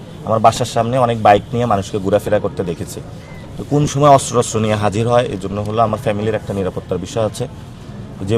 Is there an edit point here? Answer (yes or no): no